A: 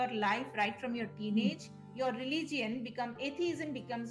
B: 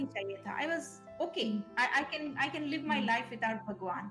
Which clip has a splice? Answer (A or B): A